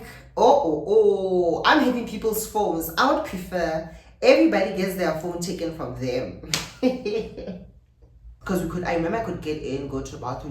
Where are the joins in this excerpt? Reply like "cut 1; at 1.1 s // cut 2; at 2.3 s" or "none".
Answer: cut 1; at 8.3 s